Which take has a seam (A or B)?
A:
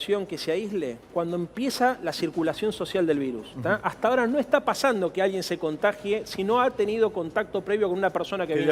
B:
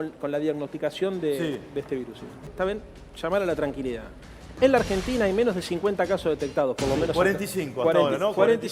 B